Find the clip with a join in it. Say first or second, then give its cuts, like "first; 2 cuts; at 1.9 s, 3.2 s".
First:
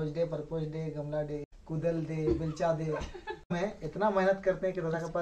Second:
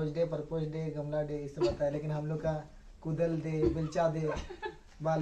first; 2 cuts; at 1.5 s, 3.5 s